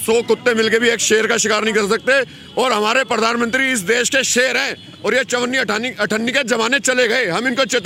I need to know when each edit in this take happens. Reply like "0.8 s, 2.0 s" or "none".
none